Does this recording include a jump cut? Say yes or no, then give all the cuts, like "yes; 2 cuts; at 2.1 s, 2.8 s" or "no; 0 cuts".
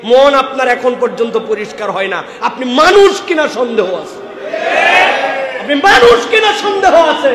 no; 0 cuts